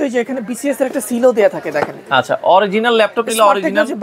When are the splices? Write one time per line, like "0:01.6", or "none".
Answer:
none